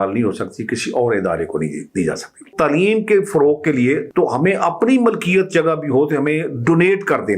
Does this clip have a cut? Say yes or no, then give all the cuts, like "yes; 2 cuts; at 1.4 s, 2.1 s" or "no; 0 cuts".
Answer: yes; 2 cuts; at 2.5 s, 4.1 s